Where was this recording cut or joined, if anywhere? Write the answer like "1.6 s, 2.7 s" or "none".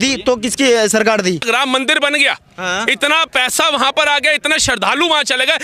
1.4 s